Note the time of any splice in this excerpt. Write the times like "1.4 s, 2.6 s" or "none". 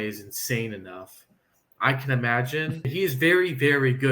2.9 s